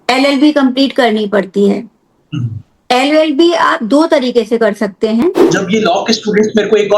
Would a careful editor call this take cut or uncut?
cut